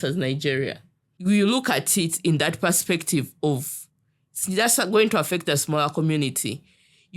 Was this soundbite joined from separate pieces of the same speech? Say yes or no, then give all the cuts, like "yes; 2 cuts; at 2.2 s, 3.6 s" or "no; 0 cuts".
yes; 1 cut; at 1.1 s